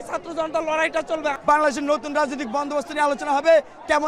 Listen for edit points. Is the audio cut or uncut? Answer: cut